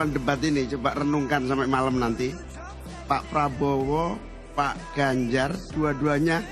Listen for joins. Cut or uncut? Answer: uncut